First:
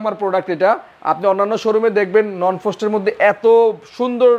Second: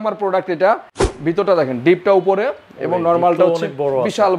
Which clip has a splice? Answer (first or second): second